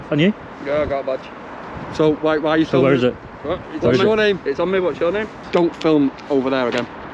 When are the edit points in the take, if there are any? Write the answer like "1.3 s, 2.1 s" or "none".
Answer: 5.4 s